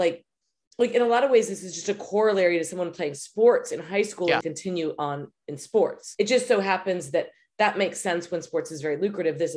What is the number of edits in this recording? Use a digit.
2